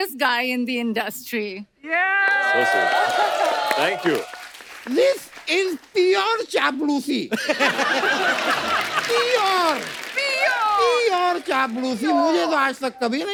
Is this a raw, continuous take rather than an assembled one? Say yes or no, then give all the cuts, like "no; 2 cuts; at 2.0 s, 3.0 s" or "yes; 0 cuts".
yes; 0 cuts